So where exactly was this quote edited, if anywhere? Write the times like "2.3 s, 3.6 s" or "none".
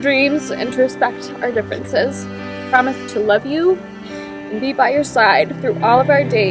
2.6 s